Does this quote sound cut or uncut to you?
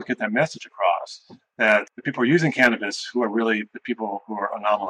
cut